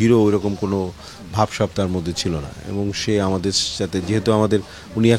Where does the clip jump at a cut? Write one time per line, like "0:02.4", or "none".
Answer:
none